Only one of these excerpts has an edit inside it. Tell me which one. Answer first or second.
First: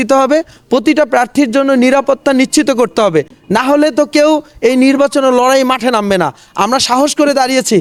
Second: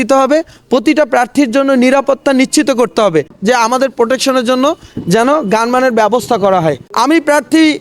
second